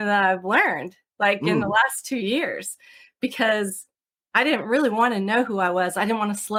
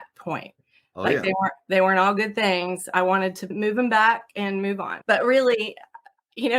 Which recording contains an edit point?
second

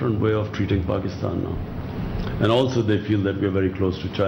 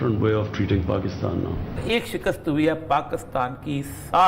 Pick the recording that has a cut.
second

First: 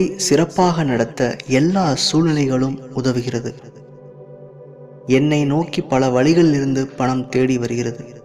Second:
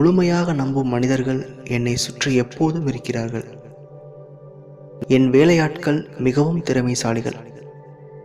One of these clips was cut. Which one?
first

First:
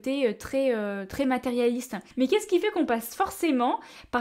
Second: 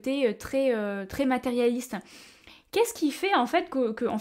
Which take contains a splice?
first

